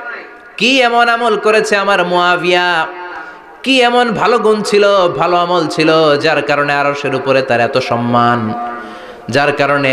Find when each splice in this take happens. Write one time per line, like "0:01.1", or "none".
none